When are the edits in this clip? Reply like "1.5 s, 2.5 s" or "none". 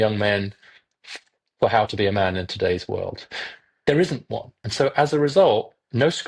4.6 s